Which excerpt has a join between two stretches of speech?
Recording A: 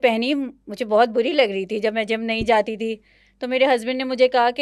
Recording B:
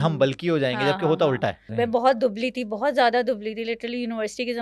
B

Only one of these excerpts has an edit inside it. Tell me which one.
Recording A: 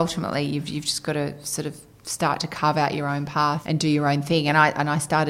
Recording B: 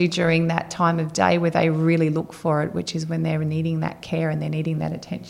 A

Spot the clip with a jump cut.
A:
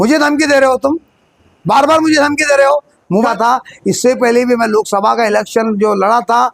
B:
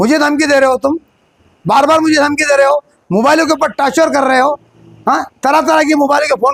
A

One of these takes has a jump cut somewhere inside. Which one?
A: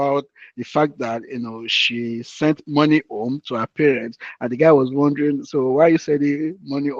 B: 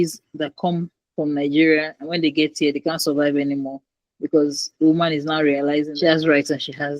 B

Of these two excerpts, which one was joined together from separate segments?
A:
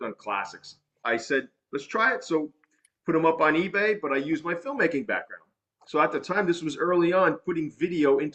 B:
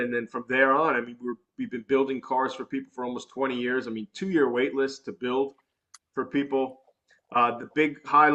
A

